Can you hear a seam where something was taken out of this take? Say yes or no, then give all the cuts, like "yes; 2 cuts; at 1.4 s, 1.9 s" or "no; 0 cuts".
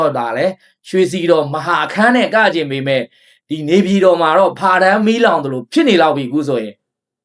no; 0 cuts